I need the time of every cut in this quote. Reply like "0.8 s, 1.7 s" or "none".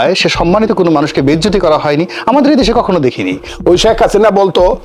3.5 s